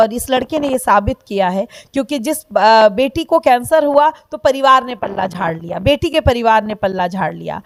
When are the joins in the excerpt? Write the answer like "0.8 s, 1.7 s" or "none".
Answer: none

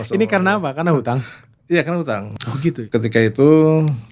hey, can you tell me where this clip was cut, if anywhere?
2.7 s

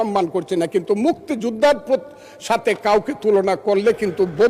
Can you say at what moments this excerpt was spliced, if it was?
none

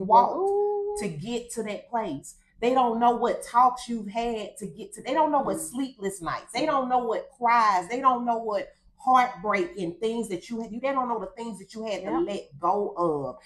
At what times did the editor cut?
none

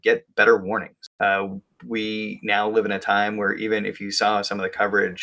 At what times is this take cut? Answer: 1.0 s

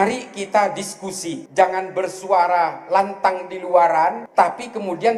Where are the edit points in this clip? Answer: 1.3 s, 4.2 s

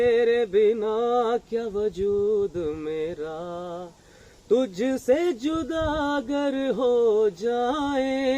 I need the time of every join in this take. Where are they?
none

